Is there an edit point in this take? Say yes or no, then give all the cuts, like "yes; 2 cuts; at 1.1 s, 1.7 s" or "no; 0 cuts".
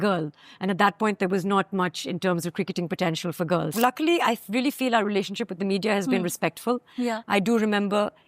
yes; 1 cut; at 3.7 s